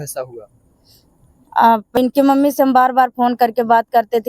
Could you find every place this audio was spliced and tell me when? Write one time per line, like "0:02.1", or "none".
0:01.9

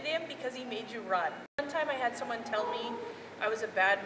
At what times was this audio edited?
0:01.6

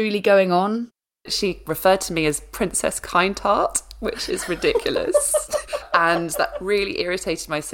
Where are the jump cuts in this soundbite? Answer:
0:01.3
0:05.8

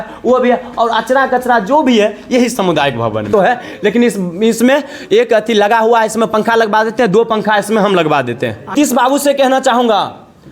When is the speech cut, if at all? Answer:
0:03.3
0:08.7

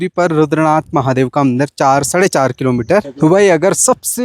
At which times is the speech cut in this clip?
0:03.1

